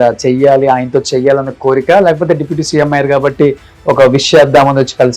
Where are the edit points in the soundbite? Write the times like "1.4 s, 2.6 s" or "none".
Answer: none